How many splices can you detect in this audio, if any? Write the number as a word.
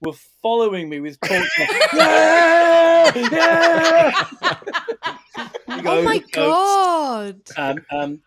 one